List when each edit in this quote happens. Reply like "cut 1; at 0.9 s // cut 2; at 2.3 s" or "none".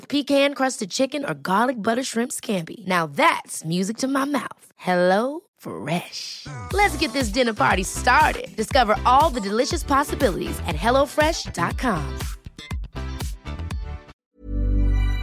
cut 1; at 14.2 s